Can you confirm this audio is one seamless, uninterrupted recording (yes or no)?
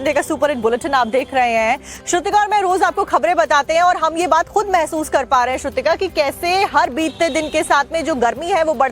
no